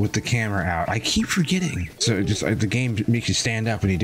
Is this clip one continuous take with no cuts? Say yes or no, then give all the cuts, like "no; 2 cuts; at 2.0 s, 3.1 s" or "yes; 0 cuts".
no; 1 cut; at 1.9 s